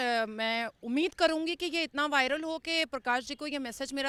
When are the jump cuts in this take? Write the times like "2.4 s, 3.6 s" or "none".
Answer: none